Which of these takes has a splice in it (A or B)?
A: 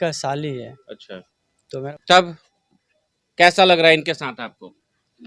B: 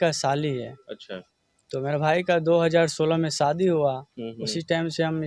A